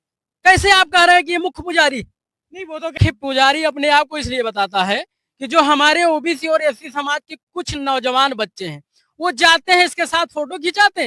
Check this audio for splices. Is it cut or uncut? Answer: cut